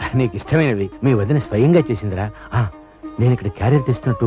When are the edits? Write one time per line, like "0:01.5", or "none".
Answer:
0:00.9